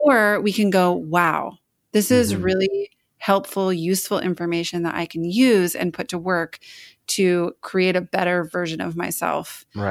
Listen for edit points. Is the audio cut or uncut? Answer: uncut